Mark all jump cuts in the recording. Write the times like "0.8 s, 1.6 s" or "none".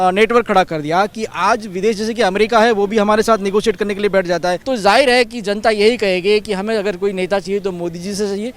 4.6 s